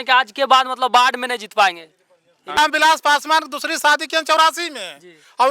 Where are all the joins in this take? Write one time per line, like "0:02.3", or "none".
0:02.6